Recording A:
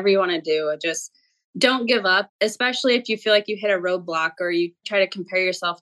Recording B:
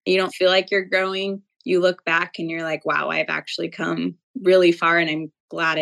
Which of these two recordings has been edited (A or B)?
A